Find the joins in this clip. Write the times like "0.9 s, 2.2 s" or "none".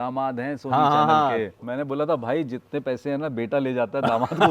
1.6 s